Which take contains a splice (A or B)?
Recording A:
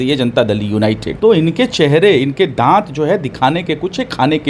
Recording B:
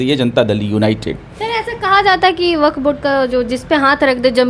A